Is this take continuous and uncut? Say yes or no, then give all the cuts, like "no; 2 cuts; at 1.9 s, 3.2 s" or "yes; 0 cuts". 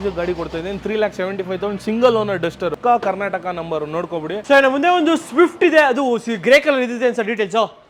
yes; 0 cuts